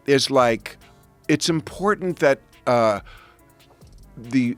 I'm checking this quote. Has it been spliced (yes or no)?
no